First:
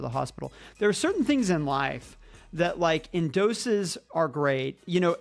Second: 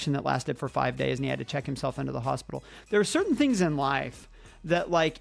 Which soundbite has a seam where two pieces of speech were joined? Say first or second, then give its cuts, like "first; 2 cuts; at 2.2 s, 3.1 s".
first; 1 cut; at 4.0 s